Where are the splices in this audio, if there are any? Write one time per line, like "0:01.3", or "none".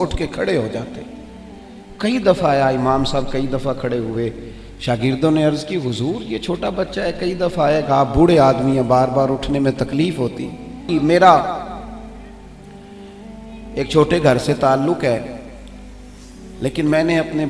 0:10.8